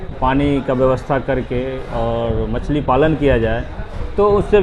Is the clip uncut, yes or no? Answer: yes